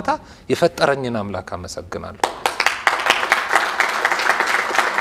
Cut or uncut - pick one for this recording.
uncut